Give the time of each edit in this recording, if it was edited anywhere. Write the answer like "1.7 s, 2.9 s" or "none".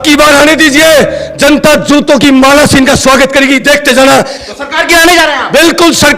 4.4 s